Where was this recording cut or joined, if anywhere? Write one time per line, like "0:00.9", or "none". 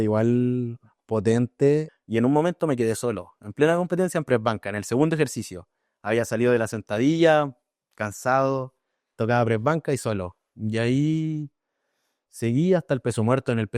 0:01.9